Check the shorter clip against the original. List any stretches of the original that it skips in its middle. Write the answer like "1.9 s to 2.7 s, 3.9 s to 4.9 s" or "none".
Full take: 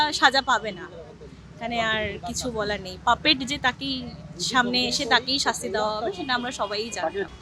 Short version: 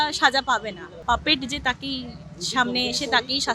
0.9 s to 2.9 s